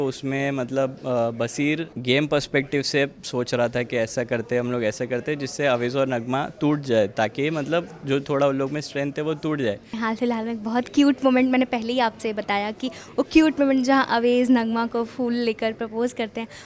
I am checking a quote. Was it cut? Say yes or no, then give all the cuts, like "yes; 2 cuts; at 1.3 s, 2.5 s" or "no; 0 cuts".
yes; 2 cuts; at 1.9 s, 9.9 s